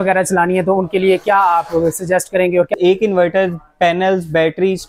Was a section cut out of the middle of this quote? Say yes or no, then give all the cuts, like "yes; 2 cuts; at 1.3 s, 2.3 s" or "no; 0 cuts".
yes; 1 cut; at 2.7 s